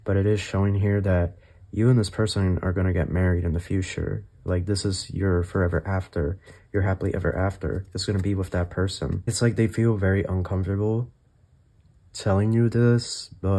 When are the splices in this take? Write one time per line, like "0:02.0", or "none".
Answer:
0:09.3